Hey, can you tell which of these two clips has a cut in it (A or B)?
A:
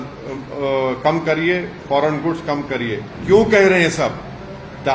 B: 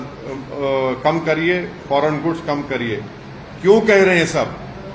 A